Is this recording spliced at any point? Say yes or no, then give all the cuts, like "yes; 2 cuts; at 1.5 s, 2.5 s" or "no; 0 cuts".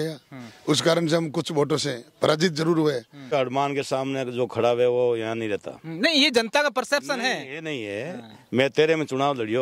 yes; 1 cut; at 3.3 s